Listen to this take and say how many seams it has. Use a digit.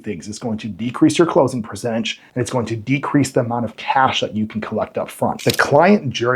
2